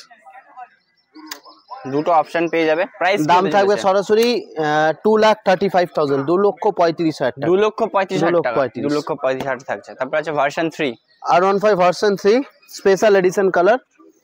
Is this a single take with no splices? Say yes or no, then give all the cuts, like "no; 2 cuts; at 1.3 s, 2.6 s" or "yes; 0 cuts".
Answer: yes; 0 cuts